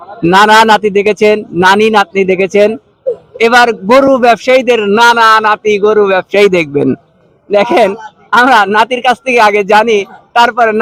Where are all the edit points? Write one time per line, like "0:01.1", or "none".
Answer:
none